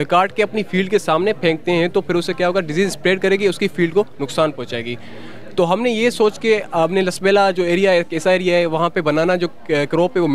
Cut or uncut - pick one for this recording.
uncut